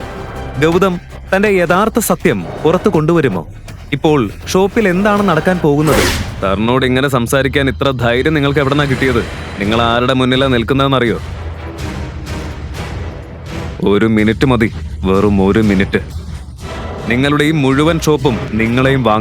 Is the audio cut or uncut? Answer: cut